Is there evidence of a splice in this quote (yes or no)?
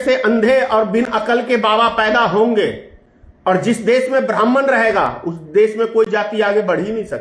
no